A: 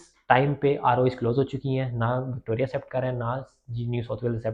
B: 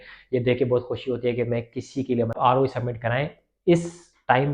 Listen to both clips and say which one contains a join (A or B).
B